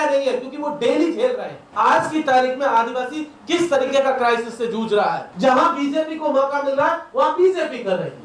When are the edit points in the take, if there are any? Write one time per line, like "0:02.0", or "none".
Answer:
0:01.7
0:05.3